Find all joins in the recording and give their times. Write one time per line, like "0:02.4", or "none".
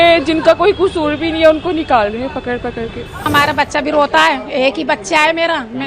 0:03.3